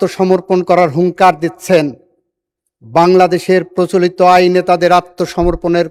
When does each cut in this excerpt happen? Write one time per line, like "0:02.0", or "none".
none